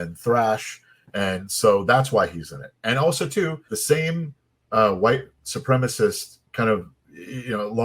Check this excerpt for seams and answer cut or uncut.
cut